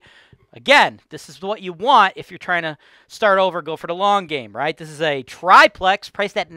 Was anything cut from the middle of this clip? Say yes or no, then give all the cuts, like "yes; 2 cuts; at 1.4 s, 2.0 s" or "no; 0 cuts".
no; 0 cuts